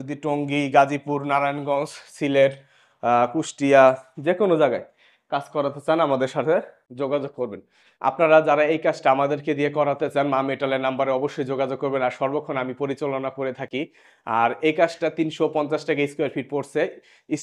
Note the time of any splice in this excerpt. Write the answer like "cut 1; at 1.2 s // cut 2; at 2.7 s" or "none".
cut 1; at 7.9 s